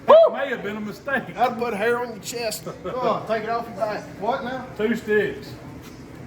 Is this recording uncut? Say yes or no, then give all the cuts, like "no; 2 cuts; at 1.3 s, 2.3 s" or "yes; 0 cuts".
no; 1 cut; at 4.1 s